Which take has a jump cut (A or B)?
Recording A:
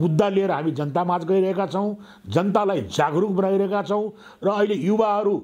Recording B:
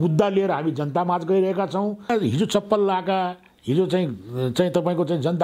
B